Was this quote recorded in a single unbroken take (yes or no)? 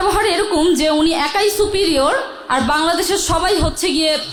yes